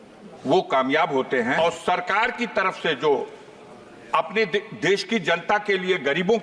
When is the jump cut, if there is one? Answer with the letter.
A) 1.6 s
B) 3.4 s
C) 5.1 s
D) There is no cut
A